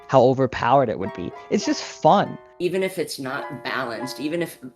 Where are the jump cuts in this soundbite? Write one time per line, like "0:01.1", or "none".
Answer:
0:02.4